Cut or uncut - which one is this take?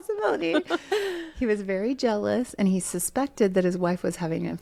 uncut